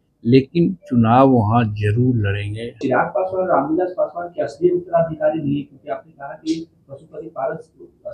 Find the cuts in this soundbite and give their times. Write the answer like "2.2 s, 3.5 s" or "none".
2.8 s

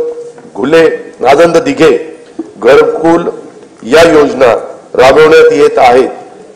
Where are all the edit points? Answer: none

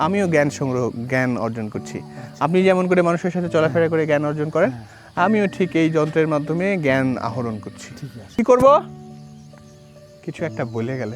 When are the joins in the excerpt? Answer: 8.4 s, 8.8 s, 10.1 s

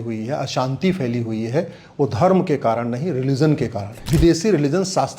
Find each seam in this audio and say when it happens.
3.9 s

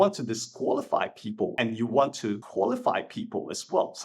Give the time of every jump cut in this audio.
1.5 s, 2.4 s

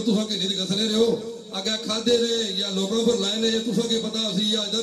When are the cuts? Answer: none

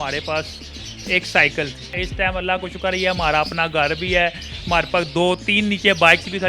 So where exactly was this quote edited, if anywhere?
2.0 s

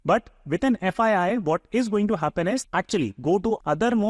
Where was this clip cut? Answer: 2.6 s

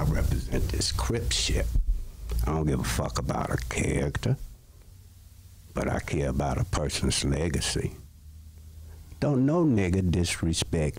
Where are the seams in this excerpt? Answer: none

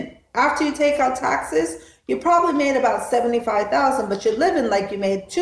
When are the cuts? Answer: none

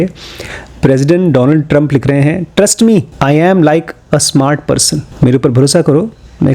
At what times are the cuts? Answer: 3.1 s, 5.0 s

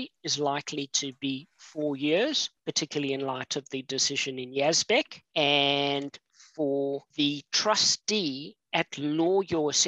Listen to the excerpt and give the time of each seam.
2.5 s, 5.2 s, 7.1 s, 8.5 s

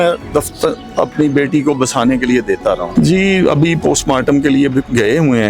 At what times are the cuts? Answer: 2.9 s

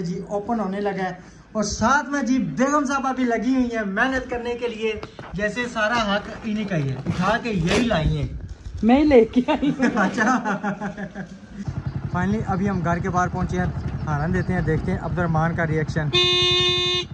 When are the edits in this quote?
11.7 s

